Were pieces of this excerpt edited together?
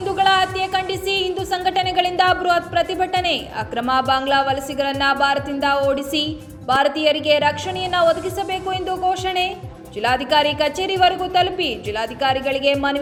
no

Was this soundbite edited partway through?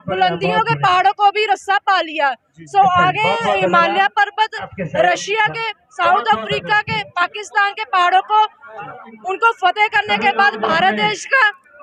no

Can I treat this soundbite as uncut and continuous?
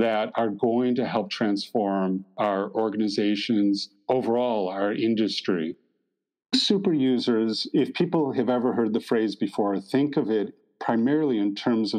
no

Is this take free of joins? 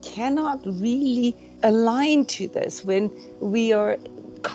no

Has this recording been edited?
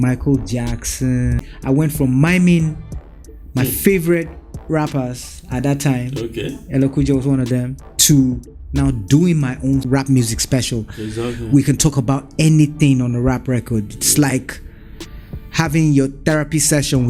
yes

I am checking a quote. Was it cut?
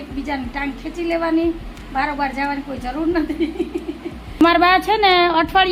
yes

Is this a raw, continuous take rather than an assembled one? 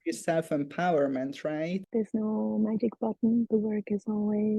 no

